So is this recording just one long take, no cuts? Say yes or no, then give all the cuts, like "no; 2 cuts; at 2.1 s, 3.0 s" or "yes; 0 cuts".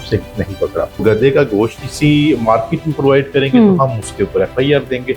no; 2 cuts; at 1.0 s, 1.8 s